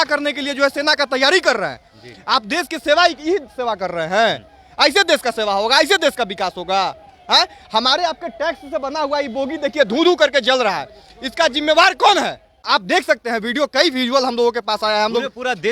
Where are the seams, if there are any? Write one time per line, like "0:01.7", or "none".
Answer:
0:12.6